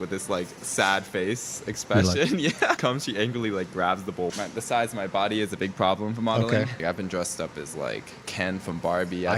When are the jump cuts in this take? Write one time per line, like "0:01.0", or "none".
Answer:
0:02.8
0:04.3
0:06.8